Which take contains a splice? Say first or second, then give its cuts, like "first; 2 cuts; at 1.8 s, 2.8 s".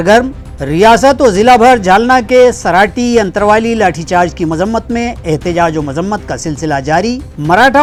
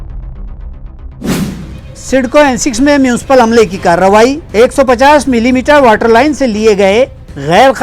second; 1 cut; at 1.3 s